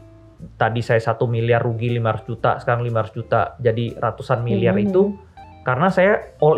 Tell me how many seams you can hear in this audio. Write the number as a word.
zero